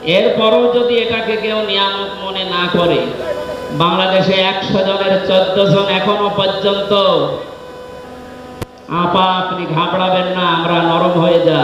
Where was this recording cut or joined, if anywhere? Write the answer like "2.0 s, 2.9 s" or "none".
3.2 s